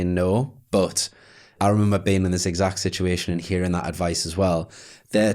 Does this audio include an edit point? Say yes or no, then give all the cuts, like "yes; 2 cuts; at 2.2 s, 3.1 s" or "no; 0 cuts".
yes; 1 cut; at 1.5 s